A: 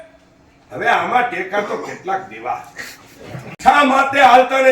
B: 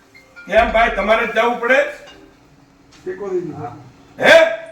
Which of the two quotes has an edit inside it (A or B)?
A